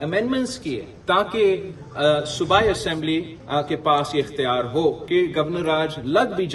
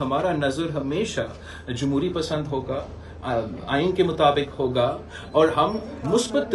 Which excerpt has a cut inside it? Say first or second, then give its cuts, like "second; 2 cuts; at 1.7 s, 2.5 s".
first; 3 cuts; at 0.9 s, 3.4 s, 5.0 s